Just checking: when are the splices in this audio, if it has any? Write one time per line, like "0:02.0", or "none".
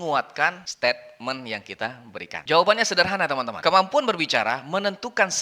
0:02.3